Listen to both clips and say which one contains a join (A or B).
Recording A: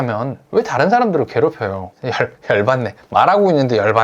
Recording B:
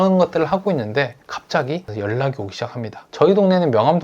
B